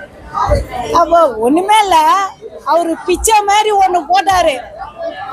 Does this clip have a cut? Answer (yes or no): no